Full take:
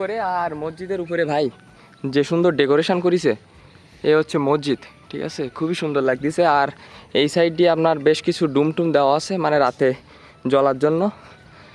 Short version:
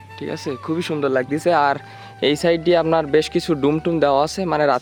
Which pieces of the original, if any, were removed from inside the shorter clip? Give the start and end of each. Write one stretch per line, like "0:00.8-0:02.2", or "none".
none